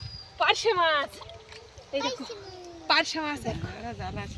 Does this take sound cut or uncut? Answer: cut